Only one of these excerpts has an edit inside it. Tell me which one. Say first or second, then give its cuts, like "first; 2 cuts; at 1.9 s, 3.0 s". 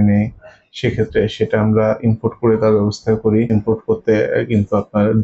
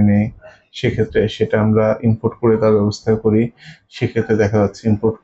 first; 1 cut; at 3.5 s